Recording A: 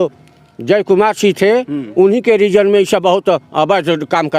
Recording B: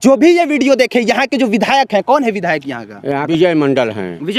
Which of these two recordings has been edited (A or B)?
B